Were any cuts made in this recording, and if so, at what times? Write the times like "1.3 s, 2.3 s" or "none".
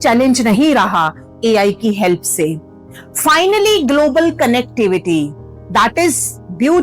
2.7 s